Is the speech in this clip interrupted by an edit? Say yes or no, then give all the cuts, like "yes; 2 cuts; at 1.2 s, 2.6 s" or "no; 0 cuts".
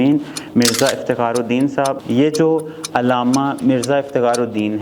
yes; 1 cut; at 2.0 s